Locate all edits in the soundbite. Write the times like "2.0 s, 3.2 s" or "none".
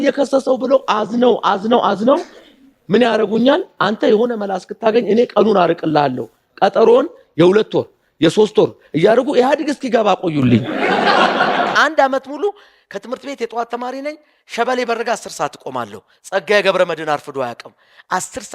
11.7 s